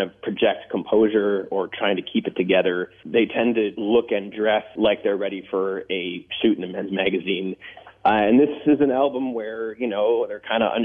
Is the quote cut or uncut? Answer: cut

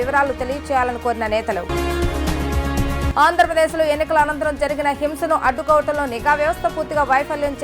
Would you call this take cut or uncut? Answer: uncut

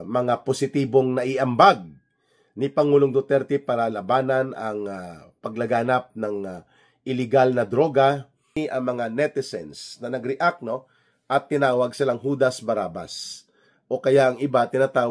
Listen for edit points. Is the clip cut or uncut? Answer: cut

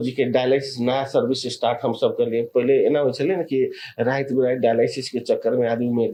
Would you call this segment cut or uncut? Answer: uncut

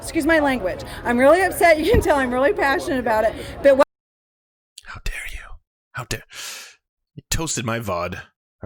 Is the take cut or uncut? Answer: uncut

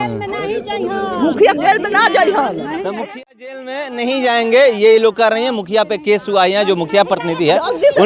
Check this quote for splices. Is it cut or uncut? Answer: uncut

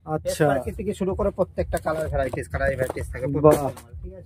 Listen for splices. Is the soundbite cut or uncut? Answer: uncut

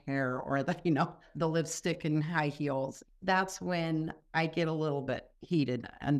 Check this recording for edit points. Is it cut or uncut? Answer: cut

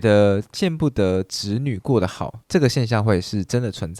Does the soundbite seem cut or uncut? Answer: uncut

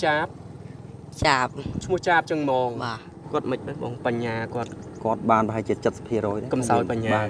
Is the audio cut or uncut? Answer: uncut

